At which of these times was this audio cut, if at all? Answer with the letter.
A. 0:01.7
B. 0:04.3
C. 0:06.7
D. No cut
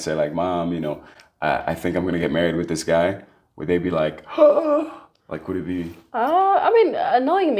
D